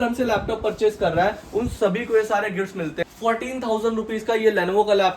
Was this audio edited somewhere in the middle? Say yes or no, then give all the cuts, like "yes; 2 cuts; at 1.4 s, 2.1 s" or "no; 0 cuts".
yes; 1 cut; at 3.0 s